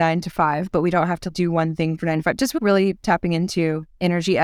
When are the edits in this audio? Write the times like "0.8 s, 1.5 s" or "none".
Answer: 1.2 s, 2.6 s